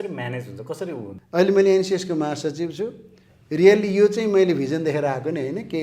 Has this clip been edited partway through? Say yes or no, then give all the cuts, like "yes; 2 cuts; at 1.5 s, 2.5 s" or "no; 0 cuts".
yes; 1 cut; at 1.2 s